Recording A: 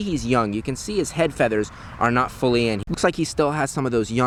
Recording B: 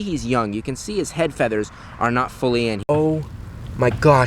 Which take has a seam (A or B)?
B